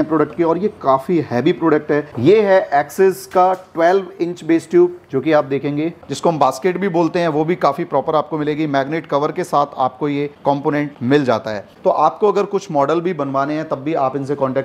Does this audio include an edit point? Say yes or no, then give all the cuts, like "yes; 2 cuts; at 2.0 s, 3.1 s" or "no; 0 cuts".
yes; 3 cuts; at 2.1 s, 6.0 s, 11.7 s